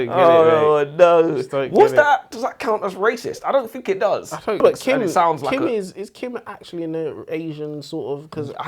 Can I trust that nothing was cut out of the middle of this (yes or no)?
no